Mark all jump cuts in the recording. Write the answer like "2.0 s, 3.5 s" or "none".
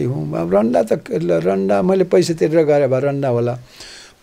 none